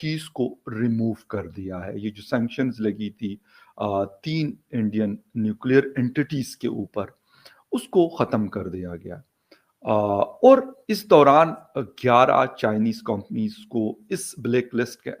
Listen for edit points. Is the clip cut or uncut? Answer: uncut